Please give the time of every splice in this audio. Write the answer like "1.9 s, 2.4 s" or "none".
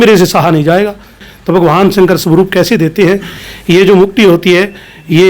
1.3 s